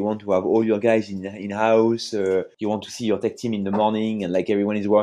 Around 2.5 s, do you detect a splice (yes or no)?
yes